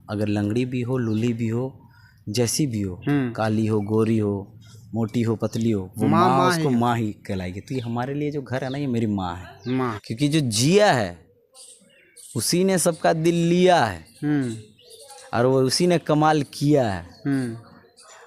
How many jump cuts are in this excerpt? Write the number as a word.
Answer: one